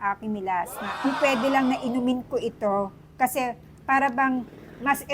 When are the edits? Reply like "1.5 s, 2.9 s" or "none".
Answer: 1.1 s

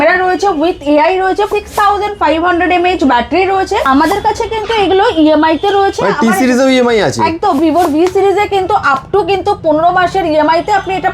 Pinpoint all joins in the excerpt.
1.5 s, 3.8 s, 7.6 s

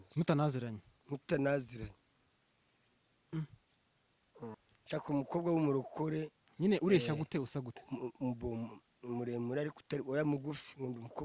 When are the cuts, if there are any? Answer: 4.5 s

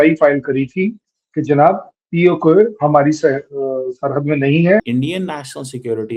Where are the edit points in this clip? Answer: 4.9 s

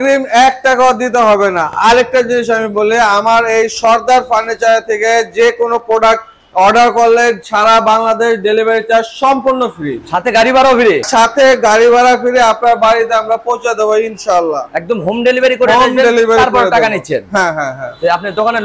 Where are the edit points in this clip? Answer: none

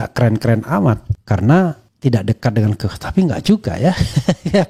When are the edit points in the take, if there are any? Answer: 1.1 s, 1.9 s

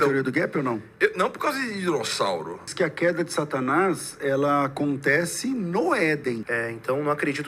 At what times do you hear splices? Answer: 2.7 s, 6.4 s

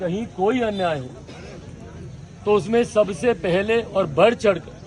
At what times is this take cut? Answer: none

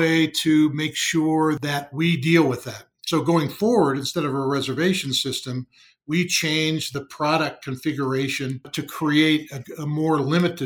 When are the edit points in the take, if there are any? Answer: 1.6 s, 6.9 s, 8.7 s

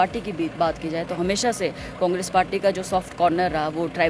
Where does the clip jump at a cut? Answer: none

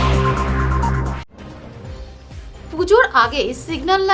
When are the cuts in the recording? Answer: 2.2 s

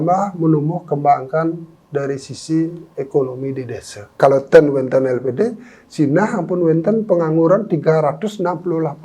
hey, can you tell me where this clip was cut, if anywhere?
4.2 s

